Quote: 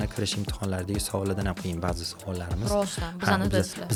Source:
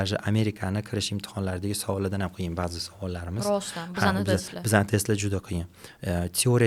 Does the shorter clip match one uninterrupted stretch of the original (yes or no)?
yes